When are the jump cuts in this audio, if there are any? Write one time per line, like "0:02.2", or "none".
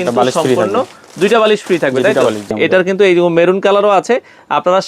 0:02.6